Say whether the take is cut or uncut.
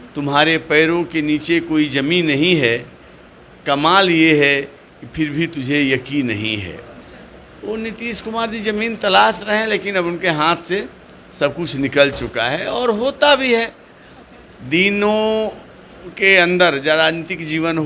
uncut